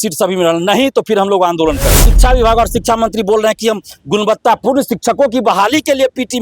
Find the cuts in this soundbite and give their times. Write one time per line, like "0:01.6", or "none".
0:02.1